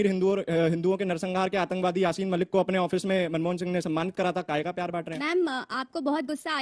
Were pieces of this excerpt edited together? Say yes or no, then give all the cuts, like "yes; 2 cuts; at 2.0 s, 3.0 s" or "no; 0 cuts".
yes; 1 cut; at 5.2 s